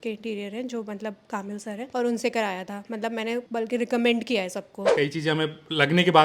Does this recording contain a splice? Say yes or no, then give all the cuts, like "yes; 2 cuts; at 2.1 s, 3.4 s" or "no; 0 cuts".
yes; 3 cuts; at 1.9 s, 3.5 s, 4.9 s